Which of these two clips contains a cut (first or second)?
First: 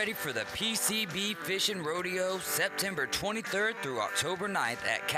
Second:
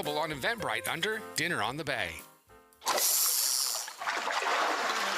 second